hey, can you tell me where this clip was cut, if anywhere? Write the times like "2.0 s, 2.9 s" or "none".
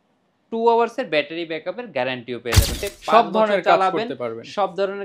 2.8 s